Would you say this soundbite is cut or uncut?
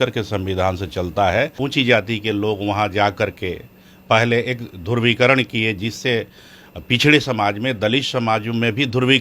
cut